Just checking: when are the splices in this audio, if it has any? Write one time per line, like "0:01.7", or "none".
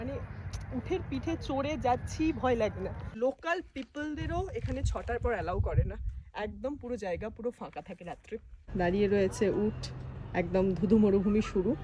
0:03.1
0:08.7

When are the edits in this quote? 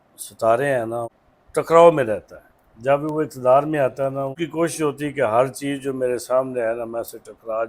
0:01.2
0:04.4

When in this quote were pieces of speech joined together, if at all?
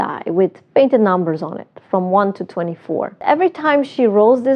0:03.2

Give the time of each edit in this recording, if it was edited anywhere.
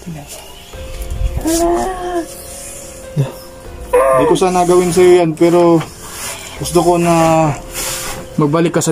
0:03.9

